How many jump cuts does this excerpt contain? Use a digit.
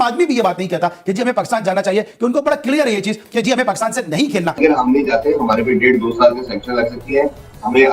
1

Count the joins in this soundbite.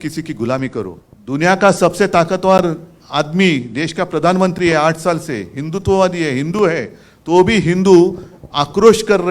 1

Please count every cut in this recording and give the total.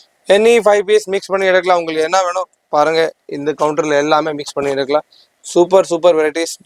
0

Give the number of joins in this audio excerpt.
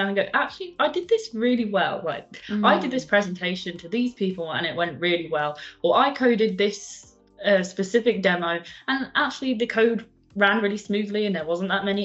0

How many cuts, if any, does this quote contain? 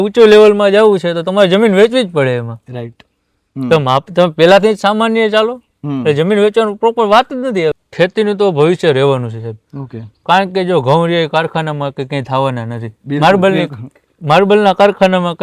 1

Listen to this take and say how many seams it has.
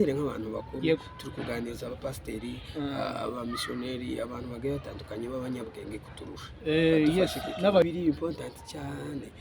1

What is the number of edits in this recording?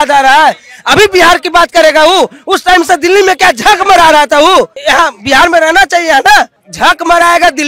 2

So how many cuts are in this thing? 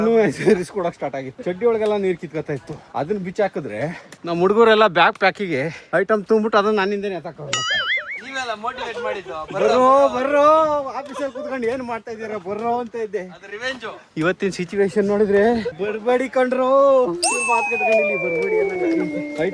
0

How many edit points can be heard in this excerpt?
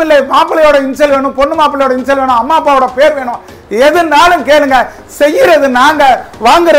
0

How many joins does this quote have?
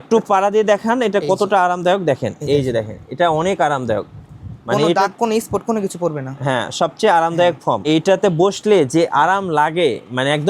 1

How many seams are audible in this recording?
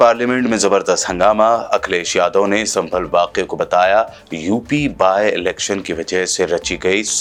0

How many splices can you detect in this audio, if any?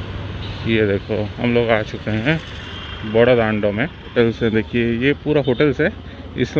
1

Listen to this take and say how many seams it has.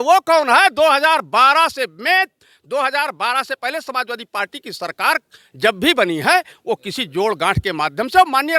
0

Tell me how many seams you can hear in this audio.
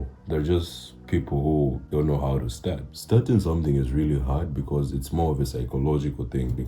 2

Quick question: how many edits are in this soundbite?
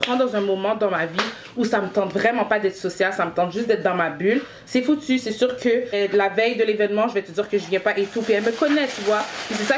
0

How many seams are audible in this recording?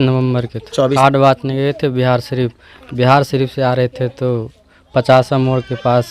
1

